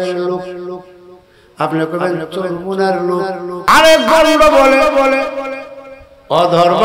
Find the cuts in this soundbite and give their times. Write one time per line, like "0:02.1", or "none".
0:03.6